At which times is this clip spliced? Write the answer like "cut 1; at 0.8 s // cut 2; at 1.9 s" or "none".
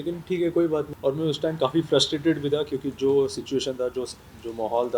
cut 1; at 0.9 s